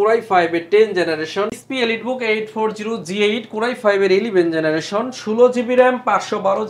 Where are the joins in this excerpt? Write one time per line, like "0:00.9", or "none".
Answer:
0:01.5